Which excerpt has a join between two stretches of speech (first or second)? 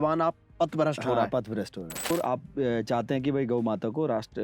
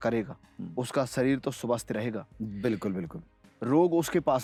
first